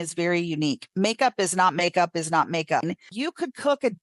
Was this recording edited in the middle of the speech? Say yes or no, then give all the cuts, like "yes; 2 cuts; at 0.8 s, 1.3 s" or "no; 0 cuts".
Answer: yes; 1 cut; at 2.8 s